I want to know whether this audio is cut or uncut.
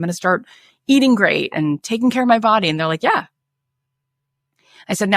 uncut